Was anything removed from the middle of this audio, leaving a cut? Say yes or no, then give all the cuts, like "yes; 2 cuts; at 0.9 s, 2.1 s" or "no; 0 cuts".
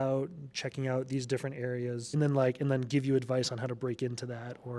yes; 1 cut; at 2.1 s